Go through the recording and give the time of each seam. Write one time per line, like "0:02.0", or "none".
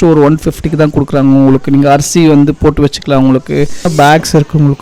0:03.9